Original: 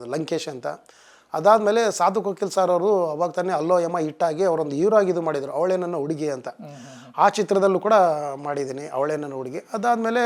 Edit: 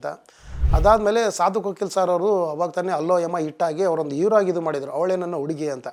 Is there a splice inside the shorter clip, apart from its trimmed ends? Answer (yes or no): no